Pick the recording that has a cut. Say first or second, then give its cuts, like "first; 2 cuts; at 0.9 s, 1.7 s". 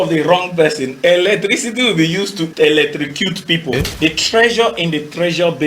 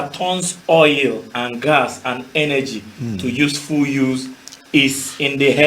first; 2 cuts; at 2.5 s, 3.8 s